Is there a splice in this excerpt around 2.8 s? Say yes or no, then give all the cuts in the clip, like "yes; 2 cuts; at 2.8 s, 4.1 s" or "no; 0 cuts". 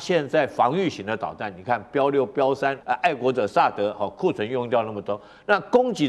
yes; 1 cut; at 2.8 s